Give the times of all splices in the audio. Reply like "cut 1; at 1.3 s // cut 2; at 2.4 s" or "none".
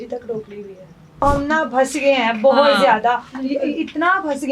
cut 1; at 1.2 s